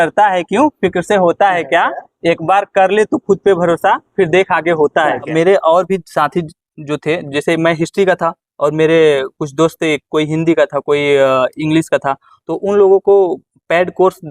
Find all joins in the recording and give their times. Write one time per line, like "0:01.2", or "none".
0:05.3